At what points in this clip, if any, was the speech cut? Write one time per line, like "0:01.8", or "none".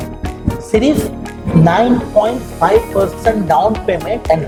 none